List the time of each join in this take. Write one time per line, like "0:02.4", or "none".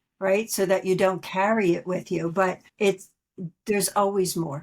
0:02.7